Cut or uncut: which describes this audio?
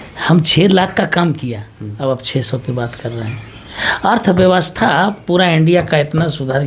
uncut